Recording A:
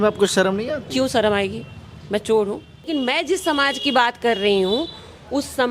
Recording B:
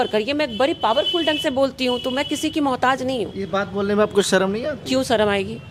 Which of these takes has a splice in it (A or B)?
A